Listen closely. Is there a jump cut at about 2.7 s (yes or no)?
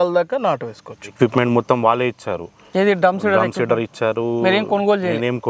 no